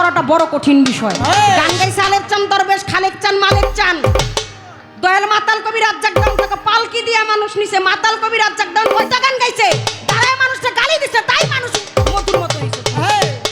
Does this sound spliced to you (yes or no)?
no